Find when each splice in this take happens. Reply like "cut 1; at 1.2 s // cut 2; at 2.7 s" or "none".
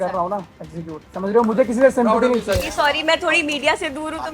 cut 1; at 1.0 s // cut 2; at 2.6 s

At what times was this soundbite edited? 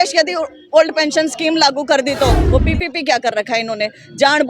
cut 1; at 2.5 s

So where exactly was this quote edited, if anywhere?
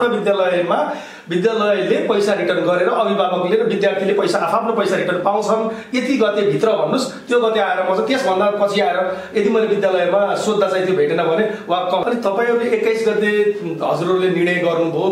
cut 1; at 12.0 s

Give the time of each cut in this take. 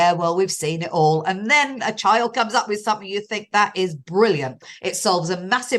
cut 1; at 4.6 s

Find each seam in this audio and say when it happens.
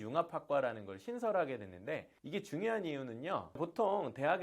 none

